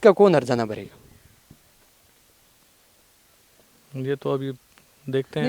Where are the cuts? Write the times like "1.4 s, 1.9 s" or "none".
none